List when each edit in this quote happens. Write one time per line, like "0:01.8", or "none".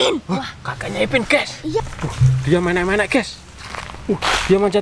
0:01.8